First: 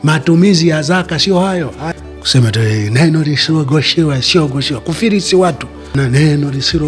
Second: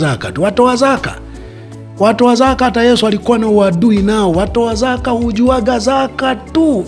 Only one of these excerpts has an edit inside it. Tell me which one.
first; 2 cuts; at 1.8 s, 5.9 s

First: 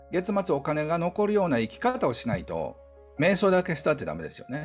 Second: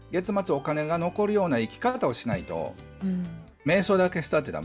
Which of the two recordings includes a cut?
first; 1 cut; at 2.9 s

